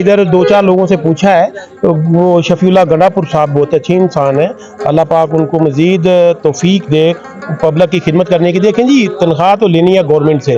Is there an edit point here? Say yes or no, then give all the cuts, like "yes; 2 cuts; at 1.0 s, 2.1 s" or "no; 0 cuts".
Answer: no; 0 cuts